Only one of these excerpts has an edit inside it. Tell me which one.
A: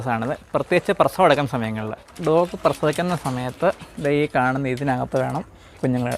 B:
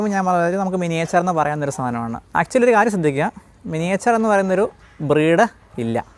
A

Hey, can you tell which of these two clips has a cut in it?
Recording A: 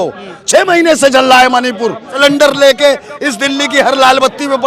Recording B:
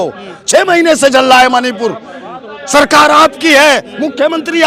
A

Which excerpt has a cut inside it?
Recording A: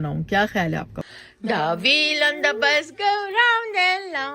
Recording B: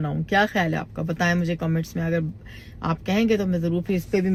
A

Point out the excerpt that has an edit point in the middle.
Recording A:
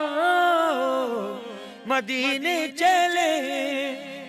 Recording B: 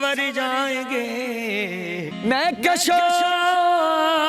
B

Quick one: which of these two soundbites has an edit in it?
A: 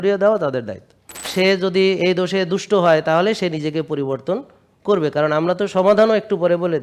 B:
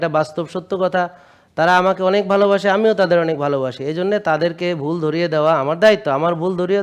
A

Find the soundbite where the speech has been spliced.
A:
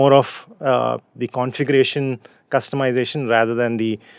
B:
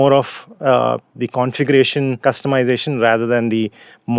B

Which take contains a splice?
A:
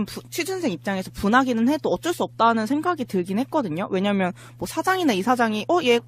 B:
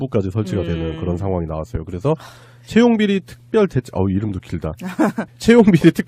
A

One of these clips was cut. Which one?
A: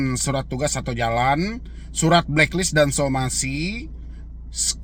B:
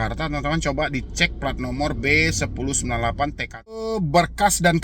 B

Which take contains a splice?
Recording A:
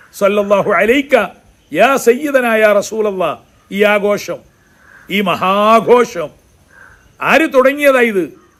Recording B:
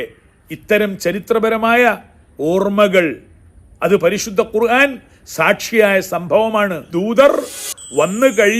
B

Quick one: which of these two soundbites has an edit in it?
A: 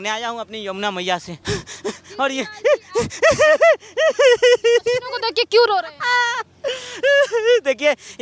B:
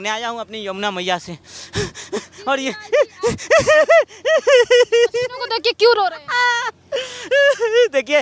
A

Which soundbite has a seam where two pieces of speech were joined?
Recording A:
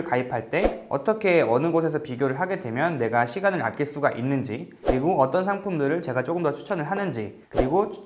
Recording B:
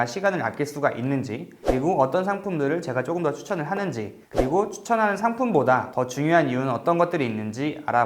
B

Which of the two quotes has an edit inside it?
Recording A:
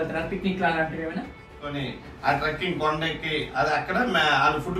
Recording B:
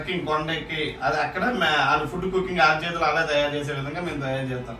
A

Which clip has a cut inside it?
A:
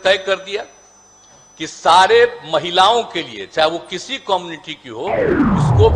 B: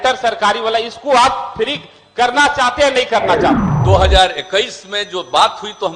B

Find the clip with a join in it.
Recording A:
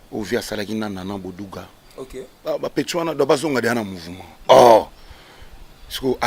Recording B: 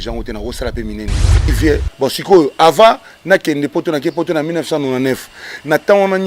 B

